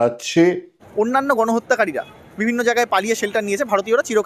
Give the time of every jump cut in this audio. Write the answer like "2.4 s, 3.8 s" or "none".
1.3 s